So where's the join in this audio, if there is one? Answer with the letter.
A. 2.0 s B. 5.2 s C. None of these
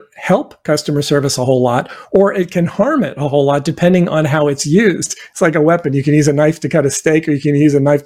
B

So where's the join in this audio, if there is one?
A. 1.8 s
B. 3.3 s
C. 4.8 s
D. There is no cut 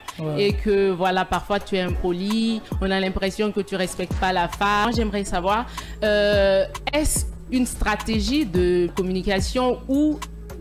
D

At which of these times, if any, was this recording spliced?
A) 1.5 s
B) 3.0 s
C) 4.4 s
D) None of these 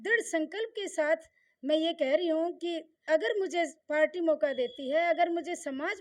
B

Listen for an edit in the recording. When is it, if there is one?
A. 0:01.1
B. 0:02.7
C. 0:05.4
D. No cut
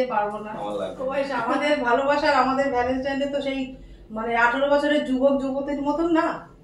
A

